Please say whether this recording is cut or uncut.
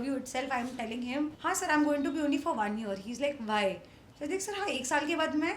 cut